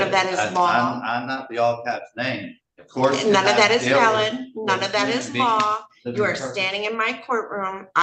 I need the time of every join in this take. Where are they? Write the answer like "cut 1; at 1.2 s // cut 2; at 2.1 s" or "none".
none